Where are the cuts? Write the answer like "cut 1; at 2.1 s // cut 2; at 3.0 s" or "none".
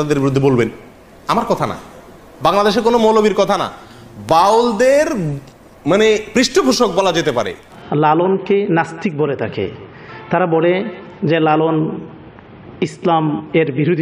cut 1; at 7.7 s